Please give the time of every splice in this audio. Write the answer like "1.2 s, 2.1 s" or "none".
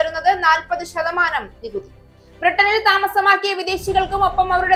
none